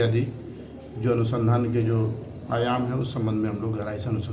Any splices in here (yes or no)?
no